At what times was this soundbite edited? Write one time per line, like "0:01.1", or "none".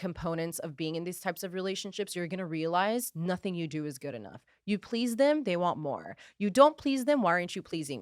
none